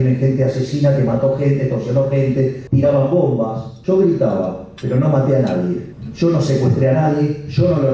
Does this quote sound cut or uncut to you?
cut